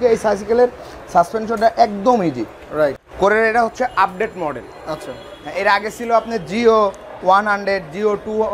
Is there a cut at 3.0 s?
yes; 1 cut; at 3.0 s

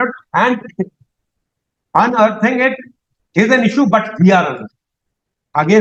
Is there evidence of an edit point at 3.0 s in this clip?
no; 0 cuts

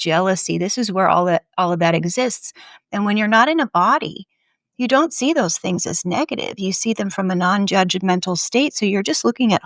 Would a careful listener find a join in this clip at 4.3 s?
no; 0 cuts

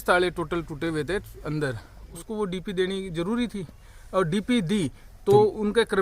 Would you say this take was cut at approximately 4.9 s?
no; 1 cut; at 2.2 s

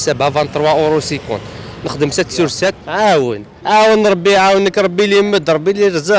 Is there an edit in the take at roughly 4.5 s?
no; 1 cut; at 2.8 s

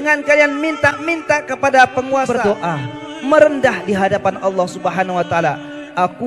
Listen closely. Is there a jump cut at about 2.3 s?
yes; 1 cut; at 2.3 s

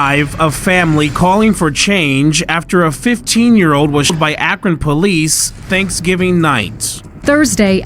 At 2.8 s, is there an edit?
no; 1 cut; at 4.1 s

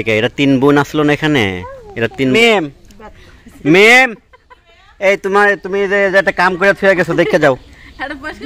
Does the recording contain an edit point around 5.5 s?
no; 1 cut; at 2.3 s

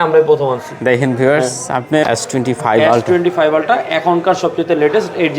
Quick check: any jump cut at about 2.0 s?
yes; 1 cut; at 2.0 s

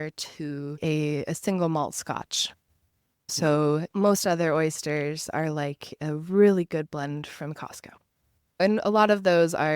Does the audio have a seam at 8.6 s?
yes; 4 cuts; at 0.8 s, 3.3 s, 3.9 s, 8.6 s

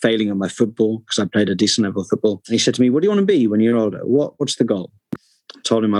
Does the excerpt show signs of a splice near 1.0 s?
no; 1 cut; at 2.4 s

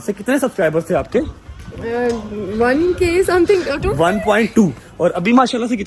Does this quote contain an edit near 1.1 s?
no; 1 cut; at 4.9 s

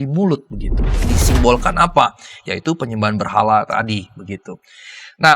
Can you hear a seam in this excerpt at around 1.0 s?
yes; 1 cut; at 1.0 s

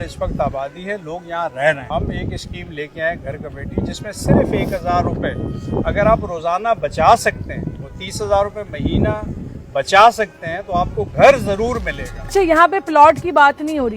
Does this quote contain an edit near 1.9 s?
yes; 2 cuts; at 1.9 s, 12.2 s

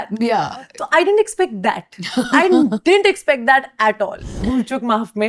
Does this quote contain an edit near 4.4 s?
yes; 1 cut; at 4.4 s

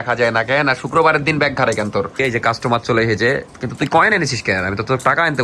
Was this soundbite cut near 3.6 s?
no; 1 cut; at 2.2 s

